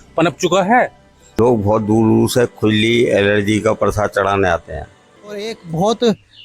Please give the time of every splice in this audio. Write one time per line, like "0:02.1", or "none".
0:01.4
0:05.4